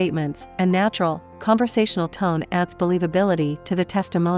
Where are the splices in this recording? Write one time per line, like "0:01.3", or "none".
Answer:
none